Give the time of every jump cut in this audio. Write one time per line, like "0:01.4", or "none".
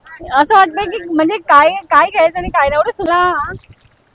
0:03.1